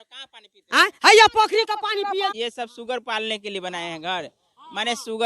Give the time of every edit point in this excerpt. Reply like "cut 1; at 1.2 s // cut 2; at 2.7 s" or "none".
cut 1; at 2.3 s